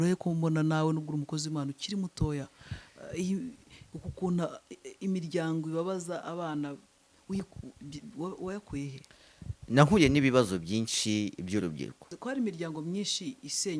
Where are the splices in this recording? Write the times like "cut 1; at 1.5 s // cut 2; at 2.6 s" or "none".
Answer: cut 1; at 7.1 s // cut 2; at 12.2 s